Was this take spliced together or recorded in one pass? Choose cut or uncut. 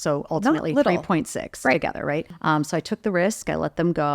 cut